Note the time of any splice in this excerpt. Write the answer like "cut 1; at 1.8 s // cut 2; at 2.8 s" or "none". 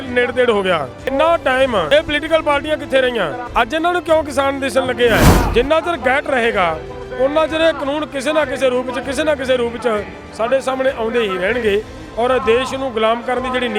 cut 1; at 1.1 s // cut 2; at 1.9 s // cut 3; at 3.4 s // cut 4; at 5.4 s